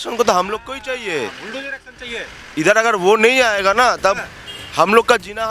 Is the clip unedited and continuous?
yes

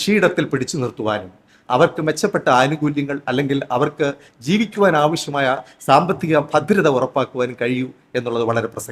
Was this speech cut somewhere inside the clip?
no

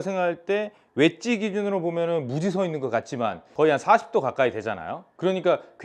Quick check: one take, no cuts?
no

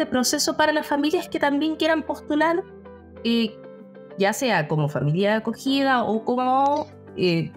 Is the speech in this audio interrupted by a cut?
no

